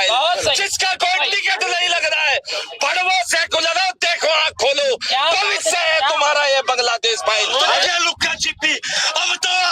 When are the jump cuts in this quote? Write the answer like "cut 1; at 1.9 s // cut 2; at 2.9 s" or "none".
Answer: cut 1; at 7.9 s